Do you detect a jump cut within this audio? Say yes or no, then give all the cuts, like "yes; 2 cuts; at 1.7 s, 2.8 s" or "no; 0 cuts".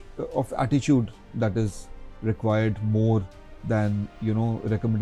no; 0 cuts